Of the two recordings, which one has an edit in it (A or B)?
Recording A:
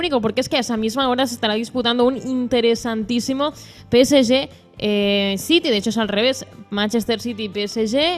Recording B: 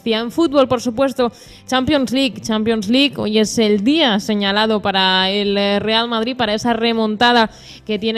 A